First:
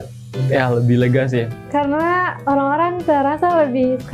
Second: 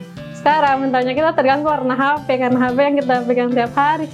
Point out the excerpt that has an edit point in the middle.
first; 1 cut; at 1.6 s

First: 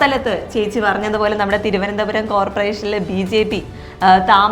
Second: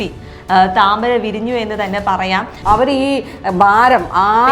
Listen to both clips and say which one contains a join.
second; 1 cut; at 2.5 s

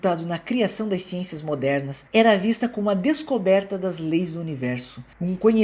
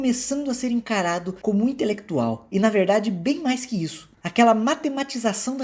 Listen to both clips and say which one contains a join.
second; 1 cut; at 4.0 s

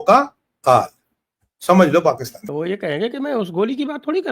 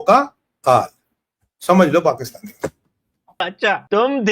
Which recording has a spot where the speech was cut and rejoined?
first; 1 cut; at 2.3 s

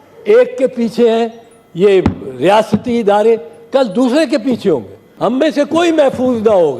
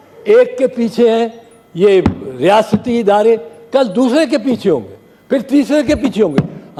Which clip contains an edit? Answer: first; 1 cut; at 5.0 s

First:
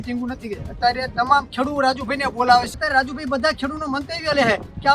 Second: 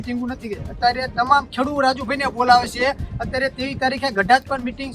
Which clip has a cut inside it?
first; 1 cut; at 2.8 s

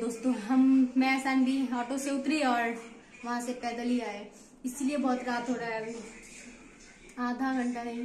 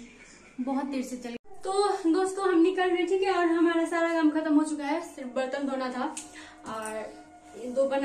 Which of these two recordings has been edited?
second; 1 cut; at 1.4 s

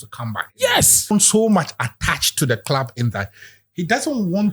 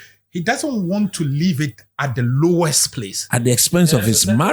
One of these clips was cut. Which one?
first; 1 cut; at 1.1 s

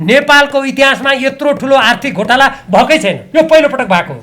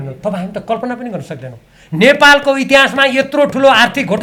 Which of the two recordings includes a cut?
first; 1 cut; at 3.2 s

